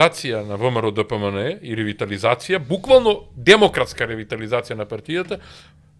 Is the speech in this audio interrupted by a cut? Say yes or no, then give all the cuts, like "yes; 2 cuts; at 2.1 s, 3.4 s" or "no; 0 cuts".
no; 0 cuts